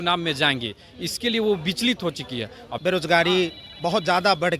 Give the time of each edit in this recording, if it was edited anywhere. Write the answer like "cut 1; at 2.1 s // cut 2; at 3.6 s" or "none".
cut 1; at 2.7 s